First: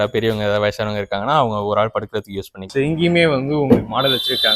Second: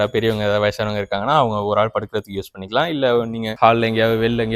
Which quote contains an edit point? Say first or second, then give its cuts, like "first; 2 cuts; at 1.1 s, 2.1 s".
first; 1 cut; at 2.7 s